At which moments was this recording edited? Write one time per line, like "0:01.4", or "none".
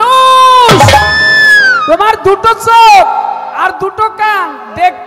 none